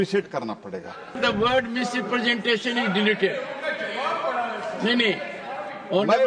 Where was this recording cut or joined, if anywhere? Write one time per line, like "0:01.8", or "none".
0:01.2